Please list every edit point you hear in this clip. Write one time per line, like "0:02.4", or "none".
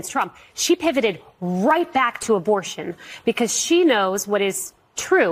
none